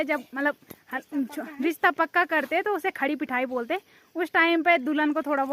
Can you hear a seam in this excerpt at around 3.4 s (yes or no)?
no